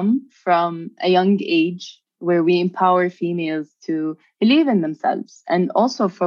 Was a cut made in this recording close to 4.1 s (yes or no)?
no